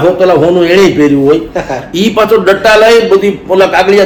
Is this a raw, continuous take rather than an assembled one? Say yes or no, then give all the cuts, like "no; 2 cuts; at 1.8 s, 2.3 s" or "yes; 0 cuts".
yes; 0 cuts